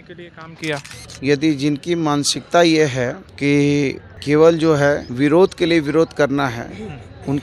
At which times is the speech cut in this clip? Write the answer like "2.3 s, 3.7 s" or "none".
3.2 s, 4.1 s, 5.1 s

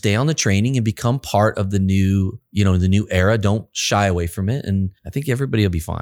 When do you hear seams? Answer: 2.4 s, 5.0 s

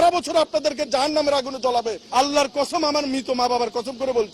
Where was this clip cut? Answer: 2.0 s

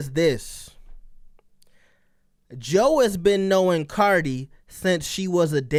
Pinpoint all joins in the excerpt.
none

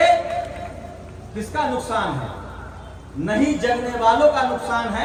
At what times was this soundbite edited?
none

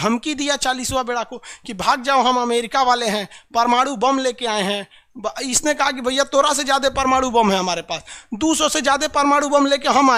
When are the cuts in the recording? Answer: none

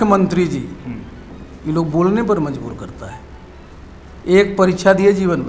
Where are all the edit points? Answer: none

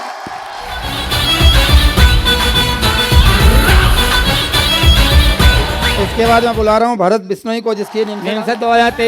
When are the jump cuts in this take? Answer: 6.0 s, 8.2 s

